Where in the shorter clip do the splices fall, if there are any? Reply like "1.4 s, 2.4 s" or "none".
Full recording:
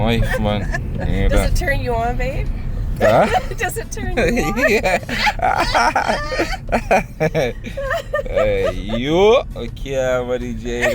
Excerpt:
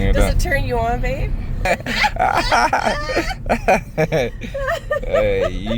1.7 s